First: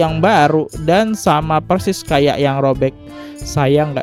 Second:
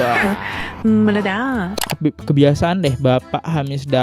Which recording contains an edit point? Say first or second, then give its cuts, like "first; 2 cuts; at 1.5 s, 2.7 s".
second; 1 cut; at 1.7 s